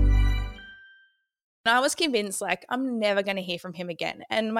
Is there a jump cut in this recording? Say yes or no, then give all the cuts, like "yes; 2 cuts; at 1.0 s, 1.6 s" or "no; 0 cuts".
yes; 1 cut; at 1.6 s